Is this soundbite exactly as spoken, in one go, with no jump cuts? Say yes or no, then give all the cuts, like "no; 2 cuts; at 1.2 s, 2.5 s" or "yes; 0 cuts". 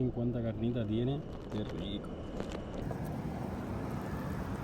no; 1 cut; at 2.8 s